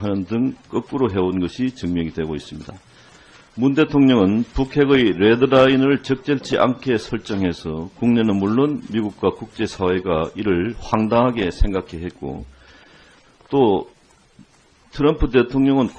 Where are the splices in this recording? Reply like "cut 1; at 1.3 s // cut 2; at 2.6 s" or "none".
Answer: cut 1; at 13.3 s